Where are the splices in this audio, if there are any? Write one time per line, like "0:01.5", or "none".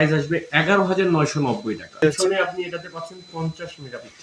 0:02.0